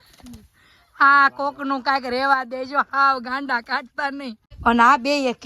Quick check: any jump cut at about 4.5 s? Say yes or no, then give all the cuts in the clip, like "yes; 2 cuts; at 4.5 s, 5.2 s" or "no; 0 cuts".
yes; 1 cut; at 4.5 s